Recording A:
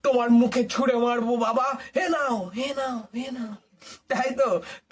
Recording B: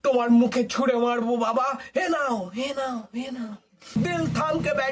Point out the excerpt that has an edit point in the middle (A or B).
B